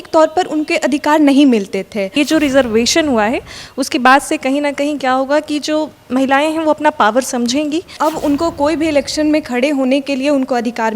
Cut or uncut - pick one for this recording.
cut